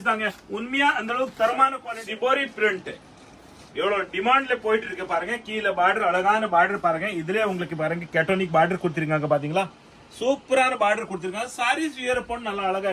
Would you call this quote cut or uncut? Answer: cut